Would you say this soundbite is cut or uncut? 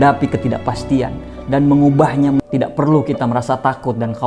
cut